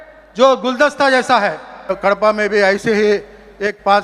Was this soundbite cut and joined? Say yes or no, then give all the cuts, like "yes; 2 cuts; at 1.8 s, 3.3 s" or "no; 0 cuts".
yes; 1 cut; at 2.0 s